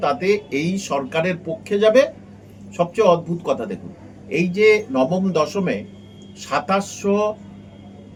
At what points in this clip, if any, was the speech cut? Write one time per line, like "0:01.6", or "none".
none